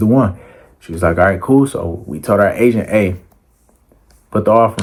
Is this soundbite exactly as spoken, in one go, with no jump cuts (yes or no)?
yes